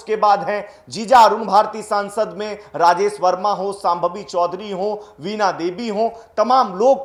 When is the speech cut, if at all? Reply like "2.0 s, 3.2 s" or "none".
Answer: none